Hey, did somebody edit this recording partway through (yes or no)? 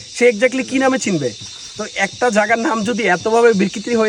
no